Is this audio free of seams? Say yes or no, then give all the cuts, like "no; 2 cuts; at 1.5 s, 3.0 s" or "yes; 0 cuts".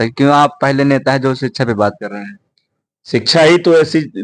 yes; 0 cuts